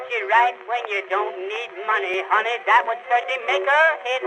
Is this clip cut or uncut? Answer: cut